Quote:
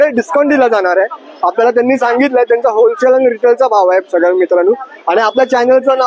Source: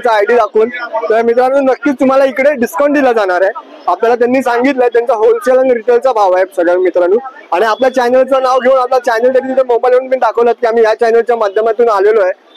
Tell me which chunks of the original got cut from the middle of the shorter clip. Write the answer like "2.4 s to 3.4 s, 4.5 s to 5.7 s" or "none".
none